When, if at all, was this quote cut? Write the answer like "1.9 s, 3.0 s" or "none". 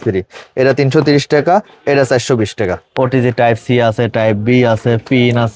2.8 s